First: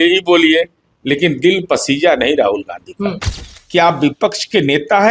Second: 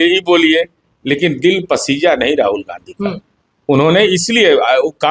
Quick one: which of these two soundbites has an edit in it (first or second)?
first